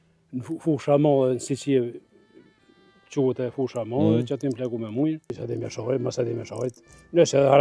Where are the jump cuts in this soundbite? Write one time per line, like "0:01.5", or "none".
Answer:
0:05.4